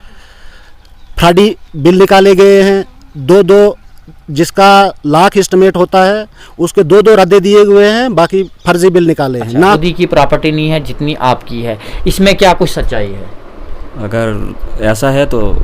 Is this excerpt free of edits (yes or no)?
no